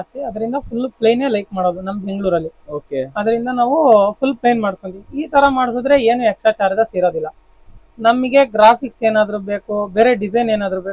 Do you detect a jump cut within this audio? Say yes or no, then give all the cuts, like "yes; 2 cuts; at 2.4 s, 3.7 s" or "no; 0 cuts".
no; 0 cuts